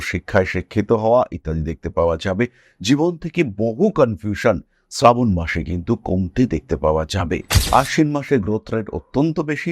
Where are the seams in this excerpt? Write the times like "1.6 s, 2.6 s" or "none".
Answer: 7.6 s